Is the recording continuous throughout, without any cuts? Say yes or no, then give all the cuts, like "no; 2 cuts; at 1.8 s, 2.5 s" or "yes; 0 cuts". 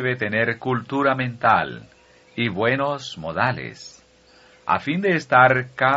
no; 1 cut; at 3.7 s